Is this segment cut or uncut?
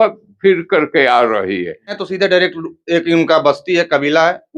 cut